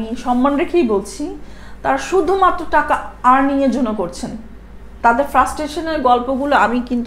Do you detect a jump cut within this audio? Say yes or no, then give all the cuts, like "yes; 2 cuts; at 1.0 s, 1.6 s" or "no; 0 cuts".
no; 0 cuts